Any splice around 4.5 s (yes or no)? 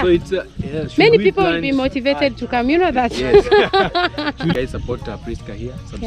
yes